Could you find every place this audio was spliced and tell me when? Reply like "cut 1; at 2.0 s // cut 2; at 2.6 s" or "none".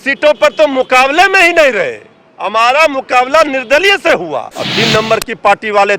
cut 1; at 4.6 s